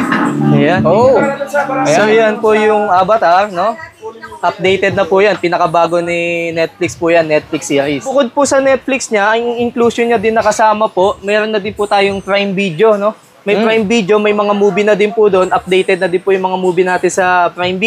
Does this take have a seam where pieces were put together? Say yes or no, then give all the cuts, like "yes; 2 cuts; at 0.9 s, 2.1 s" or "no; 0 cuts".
yes; 1 cut; at 8.1 s